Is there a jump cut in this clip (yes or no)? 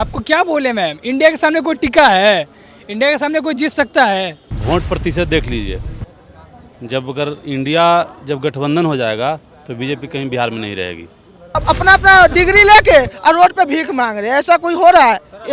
yes